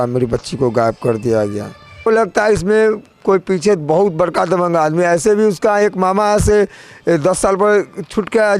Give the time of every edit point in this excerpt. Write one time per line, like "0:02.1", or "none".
0:02.1